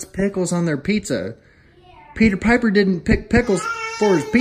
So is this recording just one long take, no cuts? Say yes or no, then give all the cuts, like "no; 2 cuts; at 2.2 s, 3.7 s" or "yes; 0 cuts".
yes; 0 cuts